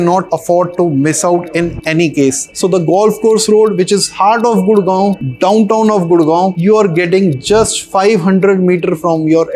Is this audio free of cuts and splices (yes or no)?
no